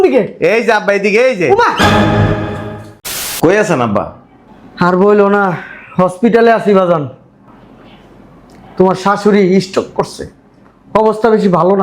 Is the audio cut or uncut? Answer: cut